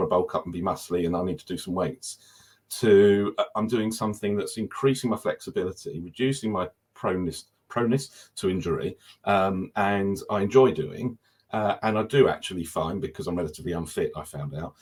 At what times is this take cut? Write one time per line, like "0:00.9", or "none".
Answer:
none